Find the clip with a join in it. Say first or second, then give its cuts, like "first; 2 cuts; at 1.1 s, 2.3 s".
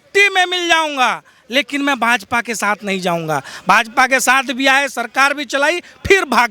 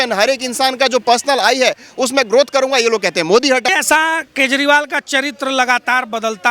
second; 1 cut; at 3.7 s